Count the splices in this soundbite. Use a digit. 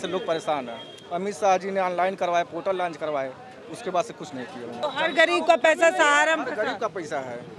1